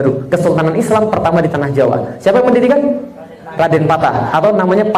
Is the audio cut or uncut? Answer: uncut